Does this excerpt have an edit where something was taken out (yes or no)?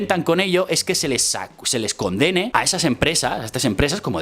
yes